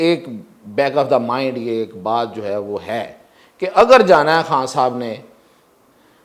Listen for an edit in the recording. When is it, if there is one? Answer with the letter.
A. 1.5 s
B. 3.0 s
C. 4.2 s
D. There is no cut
D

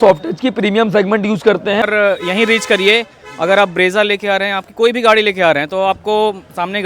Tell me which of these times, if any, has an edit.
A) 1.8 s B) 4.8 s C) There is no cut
A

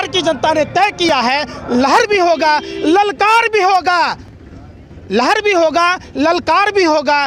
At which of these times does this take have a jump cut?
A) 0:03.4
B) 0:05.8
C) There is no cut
C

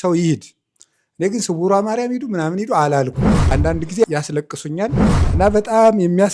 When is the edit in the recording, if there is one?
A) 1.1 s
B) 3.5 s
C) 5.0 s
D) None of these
D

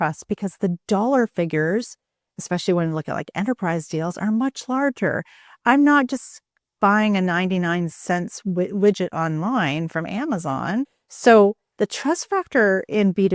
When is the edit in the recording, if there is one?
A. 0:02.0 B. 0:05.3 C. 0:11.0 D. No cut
C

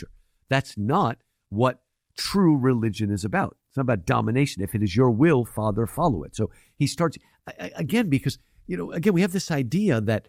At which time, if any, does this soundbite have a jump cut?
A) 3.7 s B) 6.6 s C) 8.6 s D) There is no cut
D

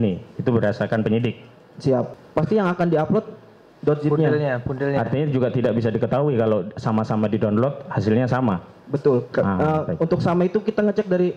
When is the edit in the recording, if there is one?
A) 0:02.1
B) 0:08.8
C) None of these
A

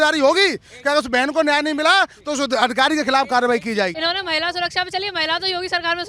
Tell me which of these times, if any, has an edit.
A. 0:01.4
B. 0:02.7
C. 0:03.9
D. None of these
C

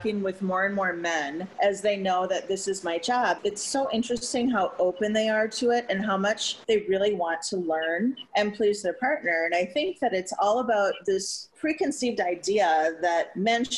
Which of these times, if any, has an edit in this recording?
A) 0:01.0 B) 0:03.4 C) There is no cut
B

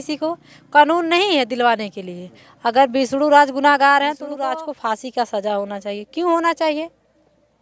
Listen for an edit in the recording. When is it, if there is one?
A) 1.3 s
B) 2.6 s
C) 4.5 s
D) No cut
C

